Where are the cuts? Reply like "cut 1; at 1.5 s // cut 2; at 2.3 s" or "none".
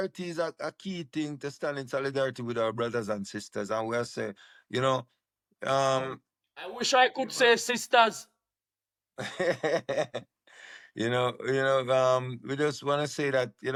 none